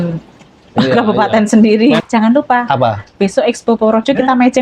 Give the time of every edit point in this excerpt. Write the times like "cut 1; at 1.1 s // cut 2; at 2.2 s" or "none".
cut 1; at 2.0 s